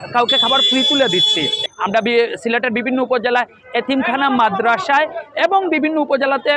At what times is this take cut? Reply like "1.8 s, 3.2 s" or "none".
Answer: 1.7 s